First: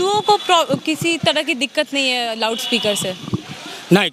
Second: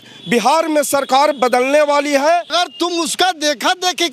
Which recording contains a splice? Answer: second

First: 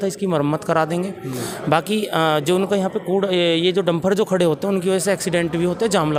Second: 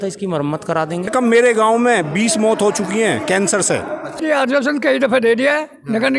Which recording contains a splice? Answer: second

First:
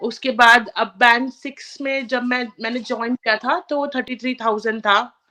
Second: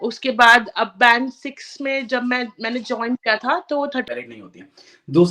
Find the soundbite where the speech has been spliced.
second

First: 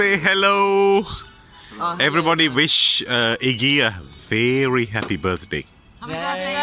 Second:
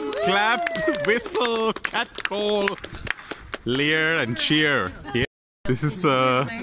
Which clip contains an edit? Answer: second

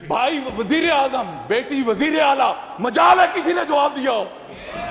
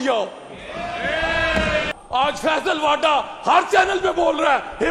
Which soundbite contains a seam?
second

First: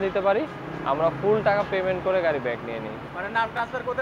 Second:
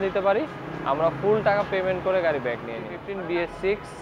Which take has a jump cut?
second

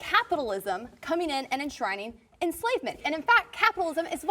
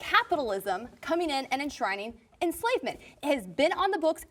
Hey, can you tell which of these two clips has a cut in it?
first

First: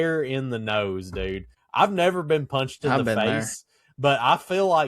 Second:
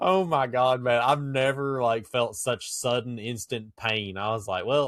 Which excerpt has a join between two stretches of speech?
first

